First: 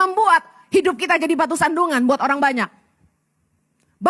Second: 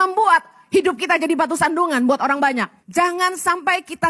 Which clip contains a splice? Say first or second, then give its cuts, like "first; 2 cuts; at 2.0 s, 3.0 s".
second; 1 cut; at 2.8 s